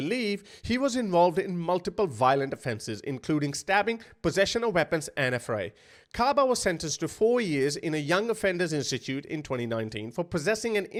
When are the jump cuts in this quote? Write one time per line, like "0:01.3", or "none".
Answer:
none